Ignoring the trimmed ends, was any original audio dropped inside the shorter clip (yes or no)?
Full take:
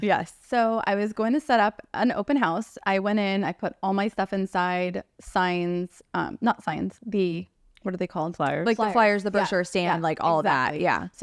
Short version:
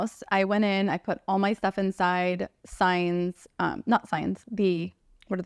no